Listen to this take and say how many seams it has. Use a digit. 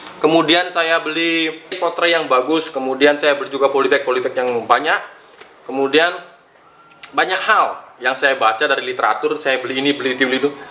1